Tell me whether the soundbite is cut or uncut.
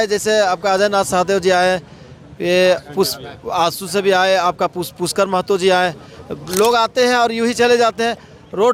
uncut